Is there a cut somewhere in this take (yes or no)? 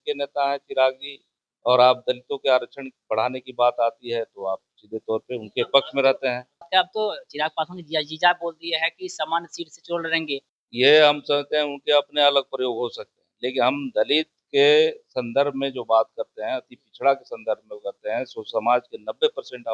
yes